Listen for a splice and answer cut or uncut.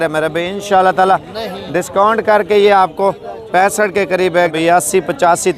cut